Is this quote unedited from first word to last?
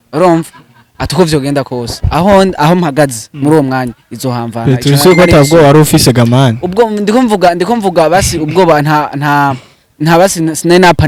yes; 0 cuts

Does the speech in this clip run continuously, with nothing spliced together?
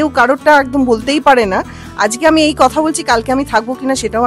yes; 0 cuts

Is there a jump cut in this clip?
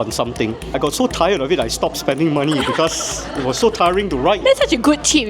yes; 2 cuts; at 0.8 s, 4.4 s

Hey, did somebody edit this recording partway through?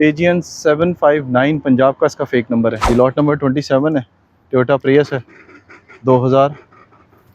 yes; 1 cut; at 2.8 s

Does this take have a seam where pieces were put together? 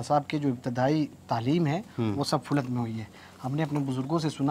no; 0 cuts

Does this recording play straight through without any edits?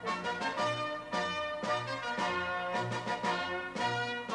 no; 1 cut; at 1.5 s

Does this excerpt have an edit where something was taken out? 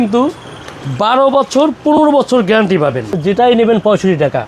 yes; 1 cut; at 3.1 s

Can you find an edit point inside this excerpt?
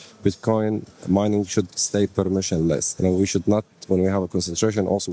yes; 1 cut; at 2.9 s

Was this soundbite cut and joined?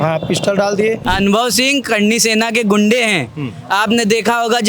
yes; 1 cut; at 1.0 s

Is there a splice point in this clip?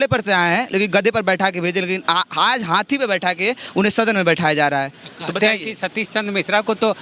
no; 0 cuts

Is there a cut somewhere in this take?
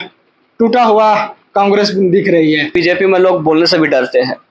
yes; 1 cut; at 2.7 s

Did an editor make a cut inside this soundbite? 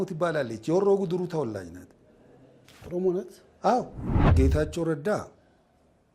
yes; 1 cut; at 4.3 s

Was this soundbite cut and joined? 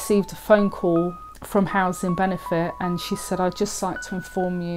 yes; 1 cut; at 1.3 s

